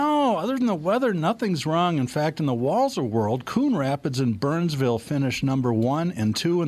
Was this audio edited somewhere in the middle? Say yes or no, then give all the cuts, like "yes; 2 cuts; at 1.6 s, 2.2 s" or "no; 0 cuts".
no; 0 cuts